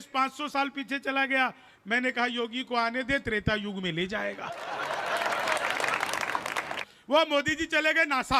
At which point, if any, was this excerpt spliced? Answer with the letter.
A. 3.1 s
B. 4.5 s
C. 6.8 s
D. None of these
C